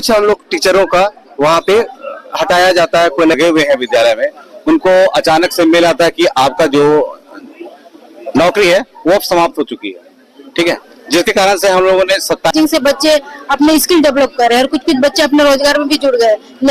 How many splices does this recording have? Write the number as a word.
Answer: two